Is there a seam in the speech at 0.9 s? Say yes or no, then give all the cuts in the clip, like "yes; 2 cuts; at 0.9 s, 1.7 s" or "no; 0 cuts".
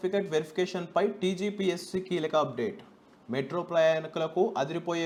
no; 0 cuts